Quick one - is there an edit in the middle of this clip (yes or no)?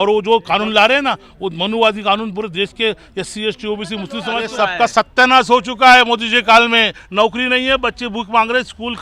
yes